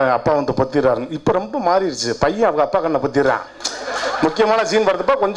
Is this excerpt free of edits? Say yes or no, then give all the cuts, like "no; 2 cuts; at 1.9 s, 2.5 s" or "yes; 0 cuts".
yes; 0 cuts